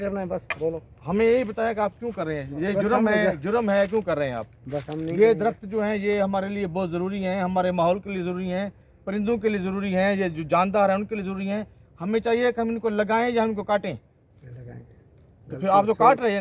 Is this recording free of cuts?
yes; 0 cuts

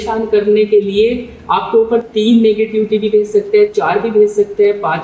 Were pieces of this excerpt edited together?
no; 0 cuts

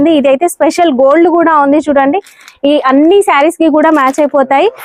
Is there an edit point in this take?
no; 0 cuts

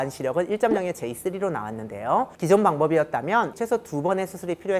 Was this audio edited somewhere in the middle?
yes; 2 cuts; at 2.3 s, 3.5 s

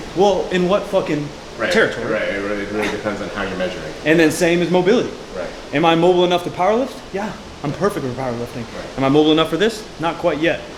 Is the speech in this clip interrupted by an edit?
no; 0 cuts

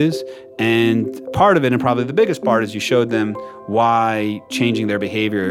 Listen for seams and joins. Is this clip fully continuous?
yes; 0 cuts

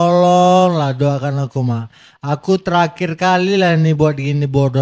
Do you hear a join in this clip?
no; 0 cuts

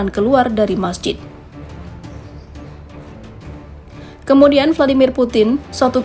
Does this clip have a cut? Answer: yes; 2 cuts; at 1.2 s, 4.2 s

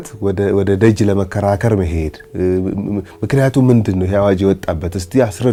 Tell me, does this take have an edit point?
no; 0 cuts

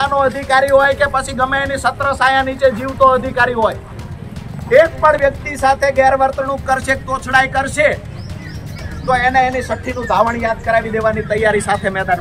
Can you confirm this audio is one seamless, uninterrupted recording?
yes; 0 cuts

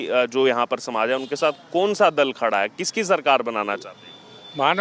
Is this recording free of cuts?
yes; 0 cuts

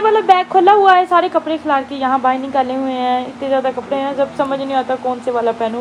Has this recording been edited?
no; 0 cuts

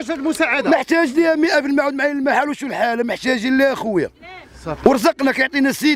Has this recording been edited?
no; 0 cuts

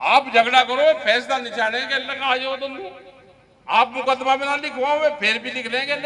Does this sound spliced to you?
no; 0 cuts

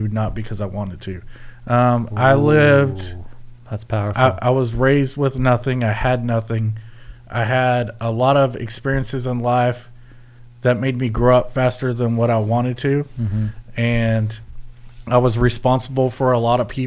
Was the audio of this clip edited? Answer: no; 0 cuts

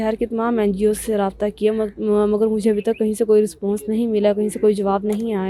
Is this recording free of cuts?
yes; 0 cuts

